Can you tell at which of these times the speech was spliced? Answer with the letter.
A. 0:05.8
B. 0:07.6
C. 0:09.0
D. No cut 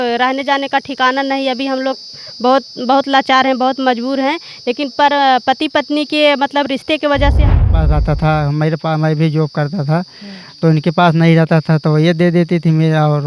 B